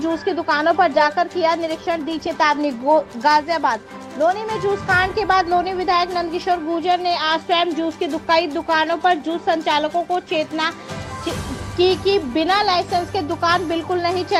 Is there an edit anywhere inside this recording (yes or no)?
no